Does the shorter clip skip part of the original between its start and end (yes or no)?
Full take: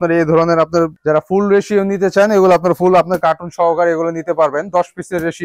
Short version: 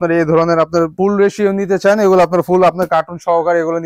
yes